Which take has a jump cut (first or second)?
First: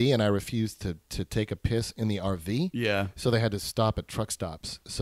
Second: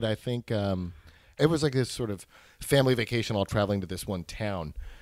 second